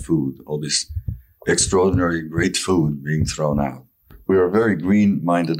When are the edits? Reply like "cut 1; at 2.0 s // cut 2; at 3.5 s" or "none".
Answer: cut 1; at 4.2 s